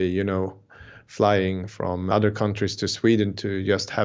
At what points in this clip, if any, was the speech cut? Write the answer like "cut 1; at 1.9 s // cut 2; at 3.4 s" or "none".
cut 1; at 2.1 s